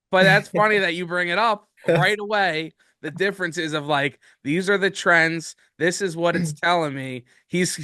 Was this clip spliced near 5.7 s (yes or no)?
no